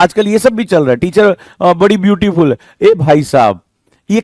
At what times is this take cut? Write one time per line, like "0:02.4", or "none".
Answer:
none